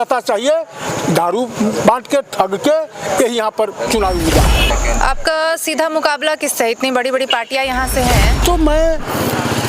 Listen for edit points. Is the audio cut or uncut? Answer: cut